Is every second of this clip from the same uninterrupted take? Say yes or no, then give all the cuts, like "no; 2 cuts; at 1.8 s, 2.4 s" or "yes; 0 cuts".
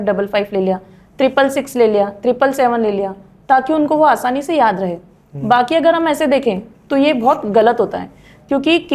yes; 0 cuts